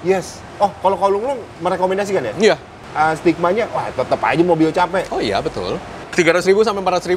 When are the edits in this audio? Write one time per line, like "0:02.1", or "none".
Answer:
0:02.8
0:06.1